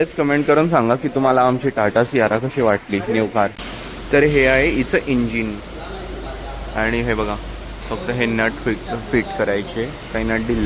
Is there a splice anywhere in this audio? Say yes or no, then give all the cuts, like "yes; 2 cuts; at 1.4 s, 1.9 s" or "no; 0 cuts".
no; 0 cuts